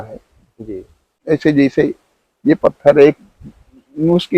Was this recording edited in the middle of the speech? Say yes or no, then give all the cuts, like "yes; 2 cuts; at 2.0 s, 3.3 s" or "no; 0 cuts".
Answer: yes; 1 cut; at 1.1 s